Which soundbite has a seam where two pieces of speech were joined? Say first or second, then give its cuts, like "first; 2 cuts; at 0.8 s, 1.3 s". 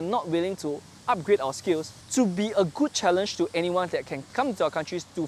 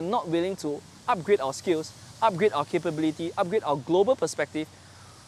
first; 2 cuts; at 2.0 s, 4.3 s